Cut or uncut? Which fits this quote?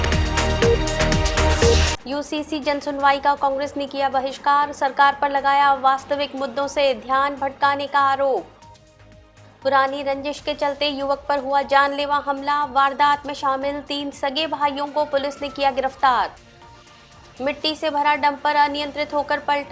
cut